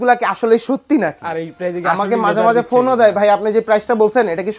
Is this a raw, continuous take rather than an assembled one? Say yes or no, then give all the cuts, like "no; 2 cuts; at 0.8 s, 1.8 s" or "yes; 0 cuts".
yes; 0 cuts